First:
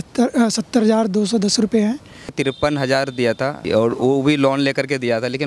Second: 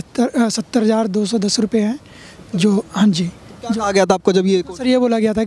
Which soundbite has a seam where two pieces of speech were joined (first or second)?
first